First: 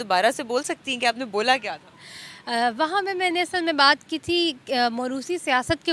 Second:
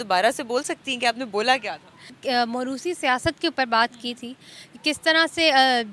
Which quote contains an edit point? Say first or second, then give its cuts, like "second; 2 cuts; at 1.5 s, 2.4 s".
second; 1 cut; at 2.2 s